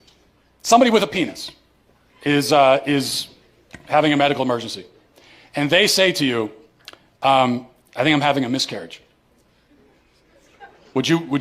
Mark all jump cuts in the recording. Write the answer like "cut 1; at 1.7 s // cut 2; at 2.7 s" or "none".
none